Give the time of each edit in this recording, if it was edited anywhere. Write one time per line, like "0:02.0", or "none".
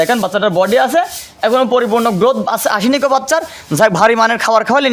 none